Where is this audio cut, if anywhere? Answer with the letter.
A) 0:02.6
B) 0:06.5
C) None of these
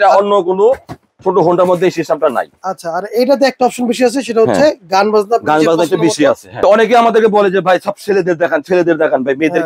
B